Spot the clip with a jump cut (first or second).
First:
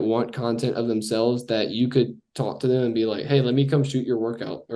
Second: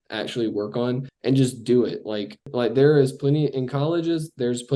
second